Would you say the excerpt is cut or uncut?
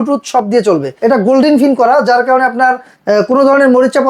cut